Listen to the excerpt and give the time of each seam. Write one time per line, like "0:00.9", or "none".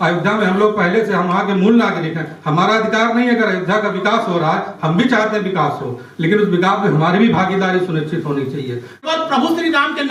0:09.0